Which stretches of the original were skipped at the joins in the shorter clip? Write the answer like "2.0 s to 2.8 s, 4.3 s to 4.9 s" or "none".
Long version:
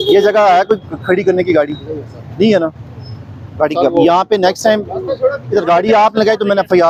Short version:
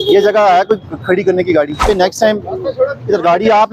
1.8 s to 4.3 s